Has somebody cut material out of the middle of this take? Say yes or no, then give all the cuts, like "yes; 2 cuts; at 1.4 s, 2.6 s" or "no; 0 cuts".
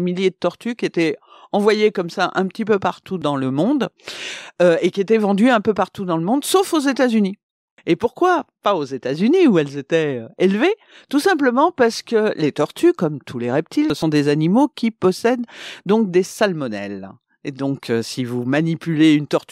no; 0 cuts